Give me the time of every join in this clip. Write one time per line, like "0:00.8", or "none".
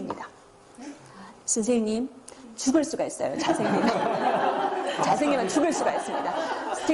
none